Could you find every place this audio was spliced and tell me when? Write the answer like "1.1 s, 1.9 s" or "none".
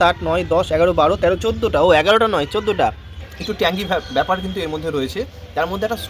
3.1 s